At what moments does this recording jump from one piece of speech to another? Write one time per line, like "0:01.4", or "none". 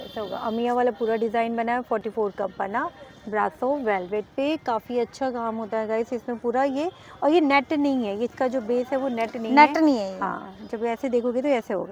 none